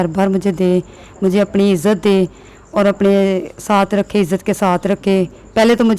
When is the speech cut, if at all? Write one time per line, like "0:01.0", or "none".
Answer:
none